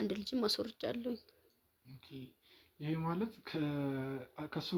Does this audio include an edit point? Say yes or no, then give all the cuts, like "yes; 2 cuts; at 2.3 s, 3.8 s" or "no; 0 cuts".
no; 0 cuts